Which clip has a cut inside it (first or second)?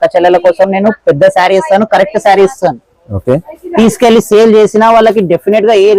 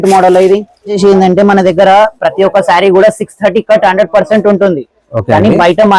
second